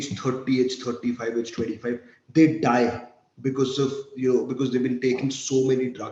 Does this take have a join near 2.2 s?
no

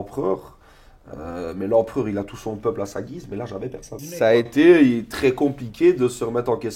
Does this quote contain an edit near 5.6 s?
no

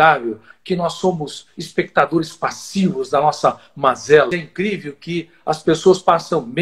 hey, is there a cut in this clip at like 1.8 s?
no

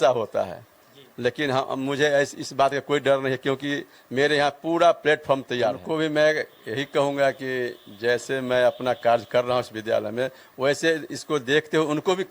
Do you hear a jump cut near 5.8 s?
yes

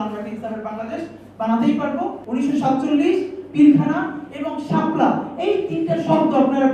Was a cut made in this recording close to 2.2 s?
yes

